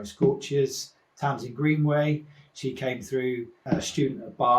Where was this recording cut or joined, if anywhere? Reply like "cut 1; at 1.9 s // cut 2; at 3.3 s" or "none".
cut 1; at 3.6 s

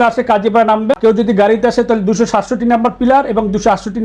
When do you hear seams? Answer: cut 1; at 1.0 s

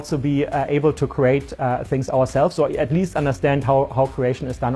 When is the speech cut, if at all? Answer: none

